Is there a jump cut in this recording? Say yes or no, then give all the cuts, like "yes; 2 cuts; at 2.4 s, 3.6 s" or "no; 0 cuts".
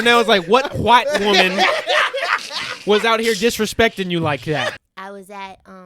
yes; 1 cut; at 4.7 s